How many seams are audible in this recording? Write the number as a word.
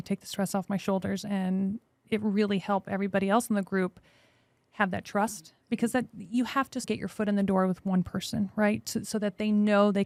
zero